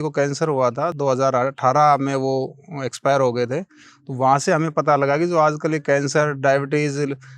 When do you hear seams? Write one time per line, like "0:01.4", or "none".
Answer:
0:01.0